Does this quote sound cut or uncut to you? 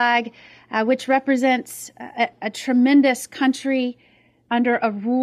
uncut